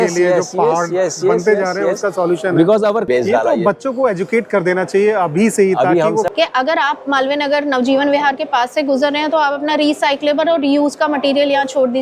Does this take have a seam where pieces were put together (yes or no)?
yes